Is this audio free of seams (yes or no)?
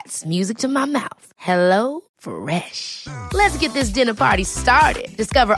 yes